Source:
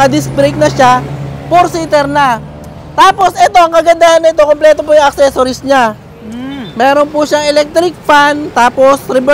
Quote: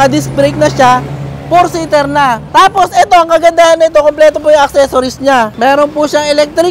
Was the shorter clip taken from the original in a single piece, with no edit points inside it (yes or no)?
no